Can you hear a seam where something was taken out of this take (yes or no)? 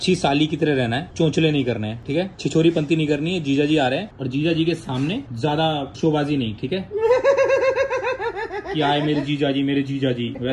no